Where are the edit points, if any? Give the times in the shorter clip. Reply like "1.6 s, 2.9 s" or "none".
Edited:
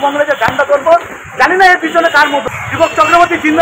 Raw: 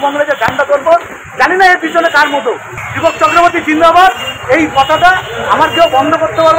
2.6 s